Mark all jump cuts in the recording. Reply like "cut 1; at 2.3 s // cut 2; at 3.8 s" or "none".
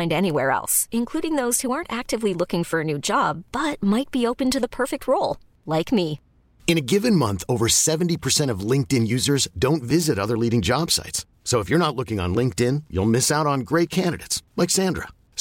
none